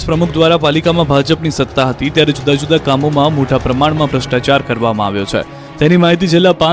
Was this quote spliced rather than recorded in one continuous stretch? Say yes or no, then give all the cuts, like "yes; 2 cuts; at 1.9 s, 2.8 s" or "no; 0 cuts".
yes; 1 cut; at 5.2 s